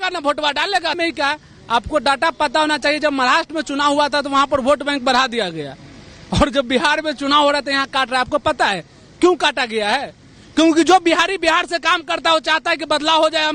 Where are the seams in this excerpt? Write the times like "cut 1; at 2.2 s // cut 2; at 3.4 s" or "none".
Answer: cut 1; at 1.0 s